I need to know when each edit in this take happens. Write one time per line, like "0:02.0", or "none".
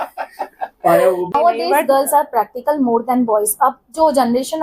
0:01.3